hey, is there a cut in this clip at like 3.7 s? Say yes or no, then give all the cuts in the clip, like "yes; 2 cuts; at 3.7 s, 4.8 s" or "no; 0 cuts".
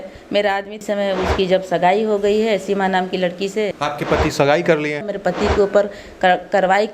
yes; 3 cuts; at 0.8 s, 3.7 s, 5.1 s